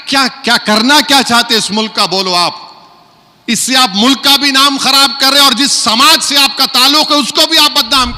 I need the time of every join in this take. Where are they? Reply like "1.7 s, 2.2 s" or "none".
none